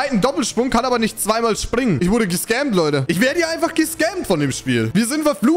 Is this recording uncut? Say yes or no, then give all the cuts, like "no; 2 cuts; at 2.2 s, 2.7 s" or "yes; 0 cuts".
no; 2 cuts; at 2.0 s, 3.0 s